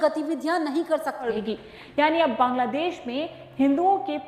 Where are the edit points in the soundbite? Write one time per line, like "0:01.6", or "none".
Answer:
0:01.1